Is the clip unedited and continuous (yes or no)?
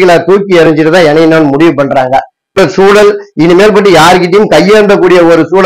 no